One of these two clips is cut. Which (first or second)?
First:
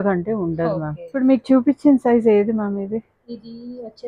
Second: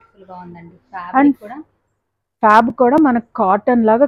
first